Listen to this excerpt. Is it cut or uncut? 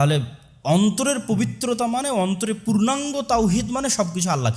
uncut